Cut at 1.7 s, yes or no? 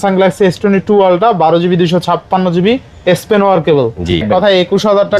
no